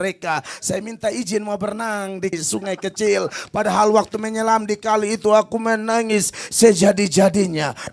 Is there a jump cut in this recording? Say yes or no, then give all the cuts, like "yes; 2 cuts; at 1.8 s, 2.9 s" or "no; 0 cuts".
yes; 1 cut; at 2.4 s